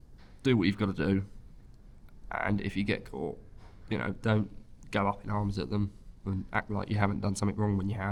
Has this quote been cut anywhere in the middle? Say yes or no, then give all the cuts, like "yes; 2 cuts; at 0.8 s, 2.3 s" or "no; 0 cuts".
no; 0 cuts